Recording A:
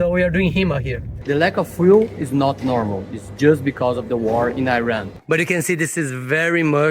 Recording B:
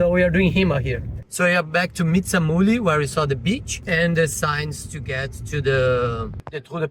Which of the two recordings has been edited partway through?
A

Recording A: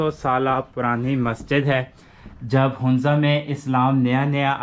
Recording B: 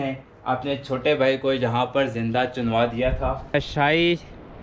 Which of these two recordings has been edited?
B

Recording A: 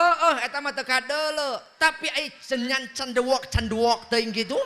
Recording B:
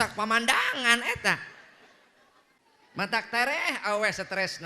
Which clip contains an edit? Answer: B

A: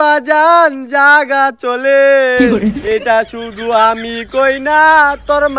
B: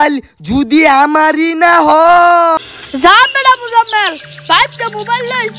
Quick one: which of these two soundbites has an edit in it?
B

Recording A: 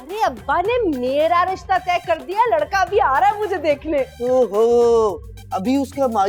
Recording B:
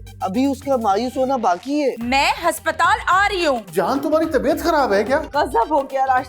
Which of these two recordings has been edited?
B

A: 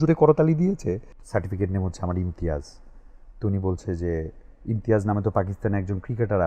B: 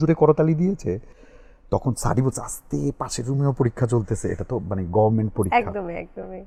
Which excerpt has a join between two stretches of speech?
A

